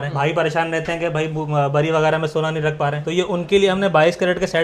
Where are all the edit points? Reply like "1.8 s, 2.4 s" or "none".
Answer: none